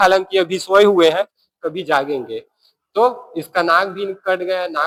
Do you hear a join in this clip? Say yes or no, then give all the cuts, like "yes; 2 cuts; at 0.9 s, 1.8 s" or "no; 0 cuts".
no; 0 cuts